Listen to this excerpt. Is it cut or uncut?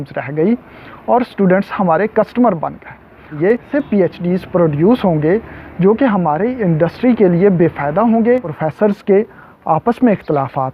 cut